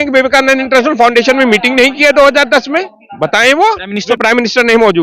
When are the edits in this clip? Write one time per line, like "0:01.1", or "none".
0:04.0